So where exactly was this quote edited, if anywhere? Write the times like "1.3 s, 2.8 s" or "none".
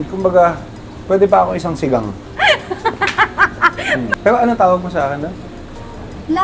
4.1 s